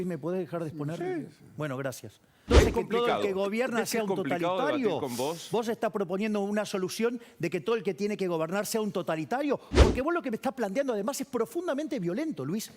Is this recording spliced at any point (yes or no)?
yes